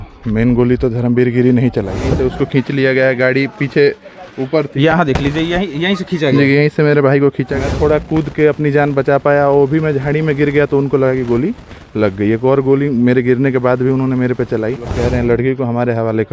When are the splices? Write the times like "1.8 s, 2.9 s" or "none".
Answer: 2.0 s, 7.5 s, 15.0 s